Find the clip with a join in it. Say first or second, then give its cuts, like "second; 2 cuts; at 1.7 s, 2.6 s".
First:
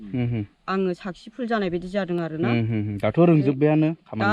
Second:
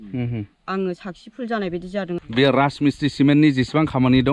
second; 1 cut; at 2.2 s